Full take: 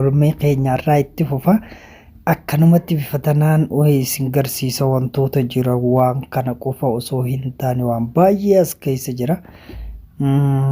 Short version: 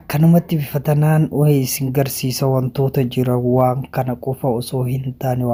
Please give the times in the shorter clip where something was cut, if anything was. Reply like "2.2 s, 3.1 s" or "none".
none